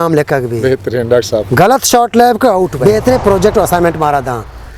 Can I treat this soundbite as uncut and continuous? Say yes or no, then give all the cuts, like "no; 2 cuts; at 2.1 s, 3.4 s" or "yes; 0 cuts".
no; 1 cut; at 2.8 s